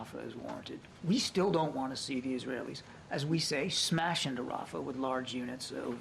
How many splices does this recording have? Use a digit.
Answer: 1